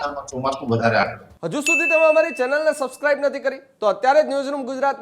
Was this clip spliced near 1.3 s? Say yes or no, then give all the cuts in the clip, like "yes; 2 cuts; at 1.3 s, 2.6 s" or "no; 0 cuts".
yes; 1 cut; at 1.3 s